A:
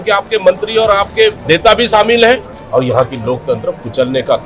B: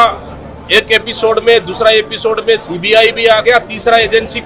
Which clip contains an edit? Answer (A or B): A